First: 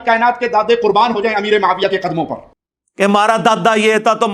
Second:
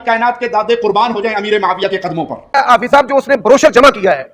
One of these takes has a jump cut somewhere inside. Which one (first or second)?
second